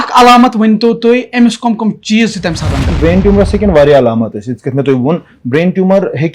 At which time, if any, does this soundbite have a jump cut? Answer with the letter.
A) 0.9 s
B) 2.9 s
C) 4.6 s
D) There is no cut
B